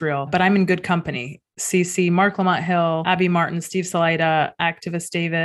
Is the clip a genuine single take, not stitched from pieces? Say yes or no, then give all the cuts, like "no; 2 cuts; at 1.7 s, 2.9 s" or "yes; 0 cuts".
yes; 0 cuts